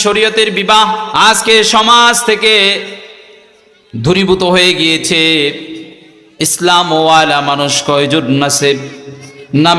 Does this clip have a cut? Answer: yes; 1 cut; at 1.1 s

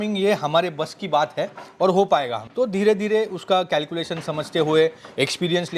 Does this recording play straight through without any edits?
yes; 0 cuts

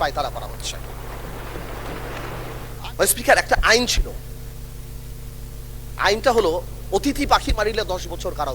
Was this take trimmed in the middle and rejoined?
yes; 1 cut; at 2.6 s

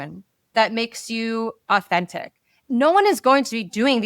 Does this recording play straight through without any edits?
no; 1 cut; at 2.5 s

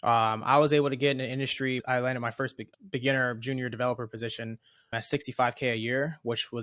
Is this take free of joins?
no; 3 cuts; at 1.8 s, 2.6 s, 4.9 s

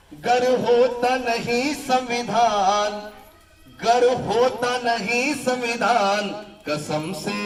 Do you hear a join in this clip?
no; 0 cuts

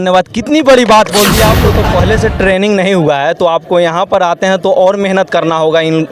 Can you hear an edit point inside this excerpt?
yes; 1 cut; at 1.6 s

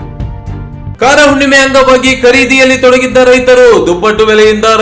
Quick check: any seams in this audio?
yes; 1 cut; at 0.9 s

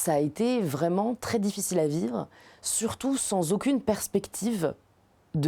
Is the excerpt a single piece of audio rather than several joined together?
yes; 0 cuts

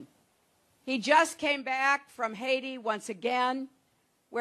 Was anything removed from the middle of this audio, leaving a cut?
no; 0 cuts

